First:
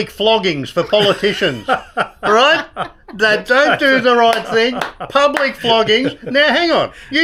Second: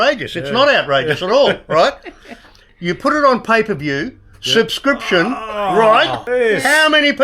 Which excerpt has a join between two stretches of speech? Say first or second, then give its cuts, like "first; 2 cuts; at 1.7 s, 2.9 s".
second; 1 cut; at 6.2 s